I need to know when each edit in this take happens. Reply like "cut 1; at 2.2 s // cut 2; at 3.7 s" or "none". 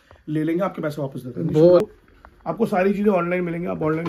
cut 1; at 1.9 s